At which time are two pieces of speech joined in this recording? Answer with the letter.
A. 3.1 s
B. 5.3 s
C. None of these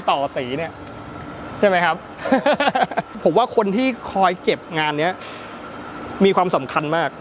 A